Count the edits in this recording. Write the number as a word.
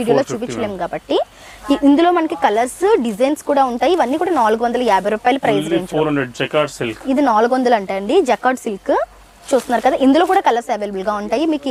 zero